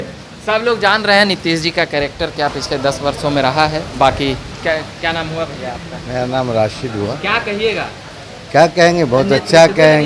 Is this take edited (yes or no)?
no